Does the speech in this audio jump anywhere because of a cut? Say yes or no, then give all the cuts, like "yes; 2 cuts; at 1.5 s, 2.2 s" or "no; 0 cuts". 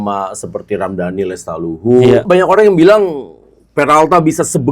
yes; 1 cut; at 2.2 s